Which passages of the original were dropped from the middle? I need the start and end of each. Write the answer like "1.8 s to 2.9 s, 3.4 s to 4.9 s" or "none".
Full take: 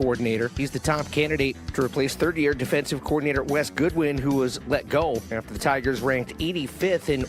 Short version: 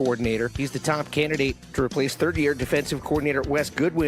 none